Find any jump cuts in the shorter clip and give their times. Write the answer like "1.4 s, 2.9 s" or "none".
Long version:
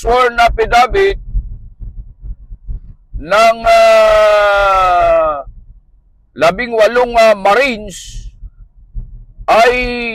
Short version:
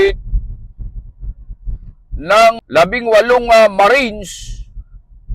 2.6 s